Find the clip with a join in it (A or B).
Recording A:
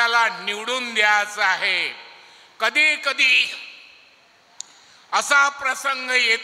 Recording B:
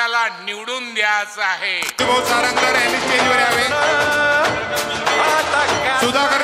B